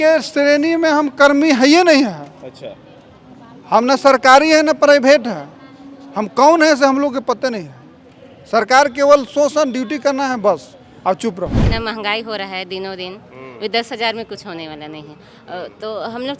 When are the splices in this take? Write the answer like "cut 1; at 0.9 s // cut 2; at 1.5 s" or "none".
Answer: cut 1; at 11.6 s